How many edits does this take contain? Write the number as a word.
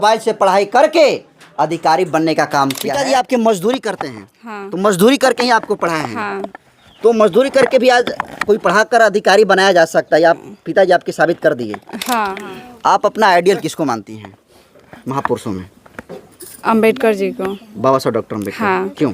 two